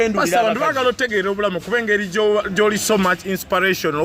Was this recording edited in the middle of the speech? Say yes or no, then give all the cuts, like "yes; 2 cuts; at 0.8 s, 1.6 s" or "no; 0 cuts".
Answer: no; 0 cuts